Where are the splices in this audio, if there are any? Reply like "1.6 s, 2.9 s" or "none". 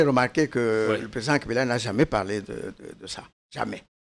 none

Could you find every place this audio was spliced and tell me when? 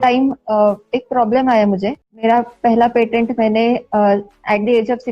2.2 s

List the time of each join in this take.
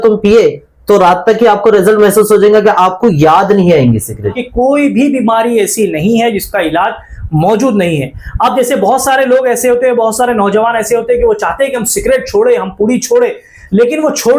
4.4 s

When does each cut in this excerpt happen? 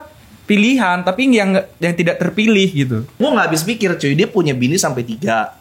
3.2 s

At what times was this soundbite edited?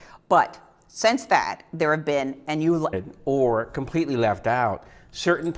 none

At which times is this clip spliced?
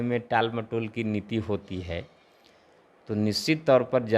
none

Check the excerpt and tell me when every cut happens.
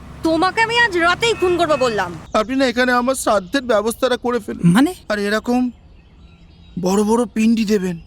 2.2 s

